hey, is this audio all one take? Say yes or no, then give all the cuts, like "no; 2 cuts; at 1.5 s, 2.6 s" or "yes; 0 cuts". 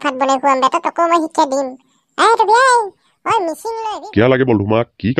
no; 1 cut; at 3.6 s